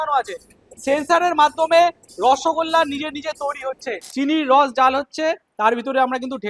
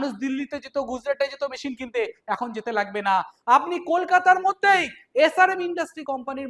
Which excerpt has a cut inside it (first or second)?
first